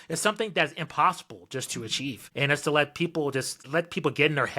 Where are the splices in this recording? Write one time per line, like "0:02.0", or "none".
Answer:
0:02.2
0:03.6